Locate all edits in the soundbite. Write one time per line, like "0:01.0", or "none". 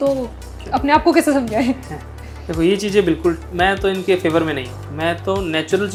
none